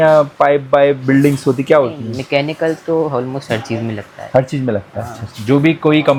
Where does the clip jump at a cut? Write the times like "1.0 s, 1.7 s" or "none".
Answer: none